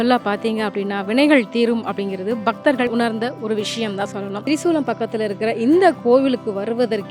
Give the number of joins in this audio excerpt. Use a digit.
2